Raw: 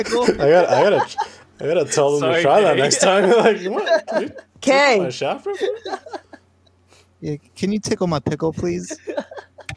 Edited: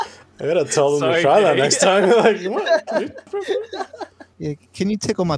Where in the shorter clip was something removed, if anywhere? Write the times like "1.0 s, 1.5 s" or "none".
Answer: 3.3 s, 4.2 s